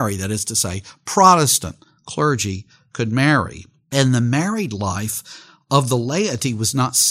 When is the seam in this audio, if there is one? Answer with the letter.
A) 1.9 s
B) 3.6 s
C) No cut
C